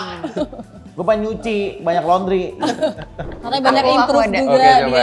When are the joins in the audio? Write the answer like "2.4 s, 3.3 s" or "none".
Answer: 3.3 s